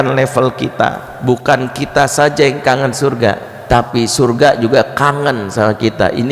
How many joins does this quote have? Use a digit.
2